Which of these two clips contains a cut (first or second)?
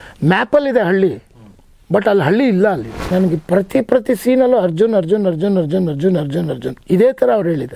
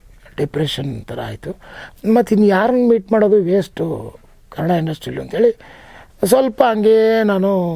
first